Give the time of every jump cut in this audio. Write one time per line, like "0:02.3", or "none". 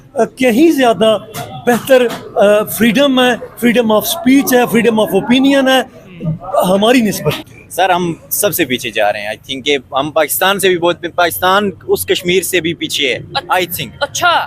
0:07.5